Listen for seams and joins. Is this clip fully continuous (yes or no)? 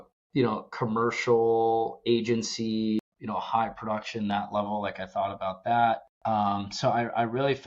no